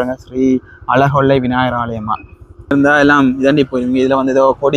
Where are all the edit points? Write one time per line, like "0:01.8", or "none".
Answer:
0:02.7